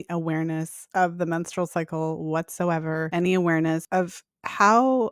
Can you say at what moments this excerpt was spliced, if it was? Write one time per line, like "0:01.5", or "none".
0:03.1
0:03.8